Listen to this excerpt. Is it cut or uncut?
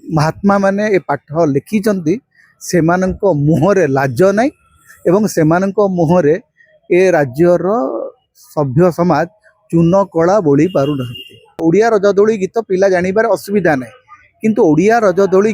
cut